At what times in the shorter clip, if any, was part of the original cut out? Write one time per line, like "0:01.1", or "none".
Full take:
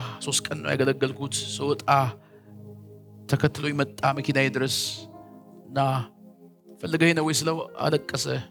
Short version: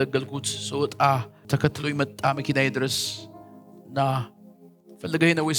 0:01.3